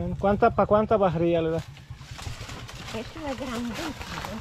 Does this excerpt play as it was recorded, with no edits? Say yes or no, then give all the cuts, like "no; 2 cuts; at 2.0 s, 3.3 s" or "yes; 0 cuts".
no; 1 cut; at 2.1 s